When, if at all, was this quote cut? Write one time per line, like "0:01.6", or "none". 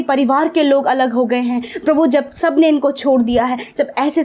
none